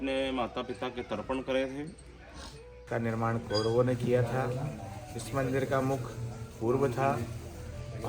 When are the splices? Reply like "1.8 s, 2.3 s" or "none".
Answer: 2.8 s

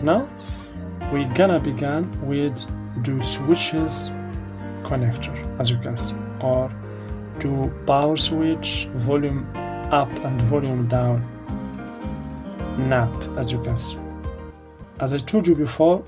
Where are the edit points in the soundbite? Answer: 14.8 s

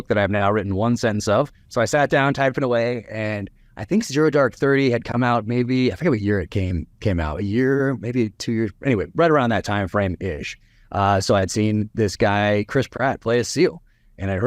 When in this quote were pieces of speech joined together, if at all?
1.6 s

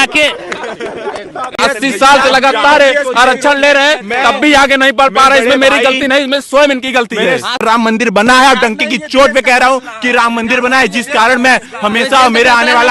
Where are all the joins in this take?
1.6 s, 7.6 s

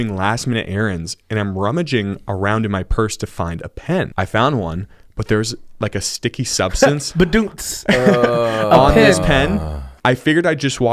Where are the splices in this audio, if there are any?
4.1 s

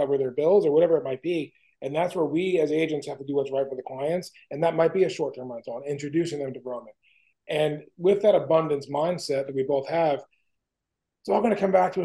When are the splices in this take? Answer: none

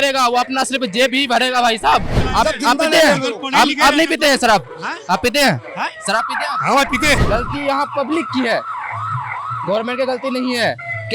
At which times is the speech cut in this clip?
2.2 s, 7.2 s

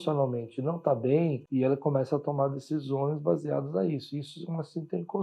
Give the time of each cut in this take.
1.4 s

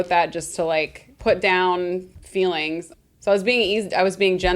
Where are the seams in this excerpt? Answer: 1.0 s, 2.2 s, 2.9 s

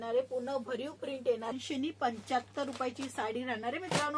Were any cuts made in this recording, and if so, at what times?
1.5 s

